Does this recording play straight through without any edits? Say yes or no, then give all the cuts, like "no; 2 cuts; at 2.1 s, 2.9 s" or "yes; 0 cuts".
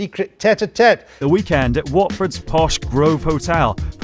yes; 0 cuts